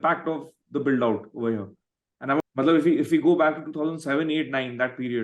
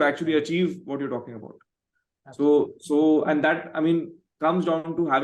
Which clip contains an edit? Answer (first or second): first